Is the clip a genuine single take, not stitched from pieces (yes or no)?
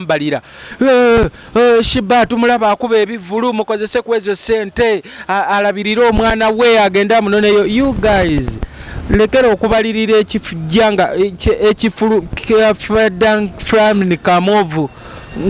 yes